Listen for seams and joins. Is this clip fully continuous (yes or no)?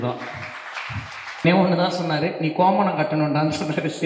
no